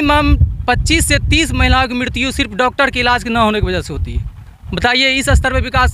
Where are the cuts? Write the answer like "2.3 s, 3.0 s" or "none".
none